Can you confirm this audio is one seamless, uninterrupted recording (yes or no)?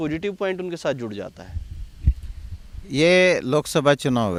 yes